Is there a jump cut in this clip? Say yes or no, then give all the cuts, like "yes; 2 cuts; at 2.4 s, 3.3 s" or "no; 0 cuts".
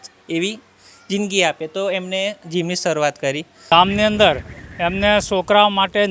yes; 1 cut; at 3.5 s